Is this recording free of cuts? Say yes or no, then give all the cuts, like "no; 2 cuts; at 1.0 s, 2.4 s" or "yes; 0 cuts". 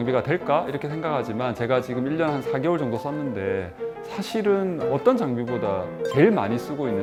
yes; 0 cuts